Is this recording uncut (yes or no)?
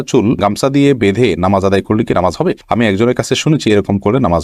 yes